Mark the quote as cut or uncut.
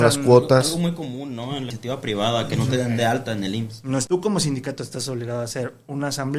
cut